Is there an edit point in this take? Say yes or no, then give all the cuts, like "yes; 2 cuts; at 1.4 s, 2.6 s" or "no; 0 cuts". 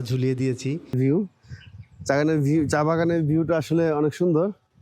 yes; 1 cut; at 0.9 s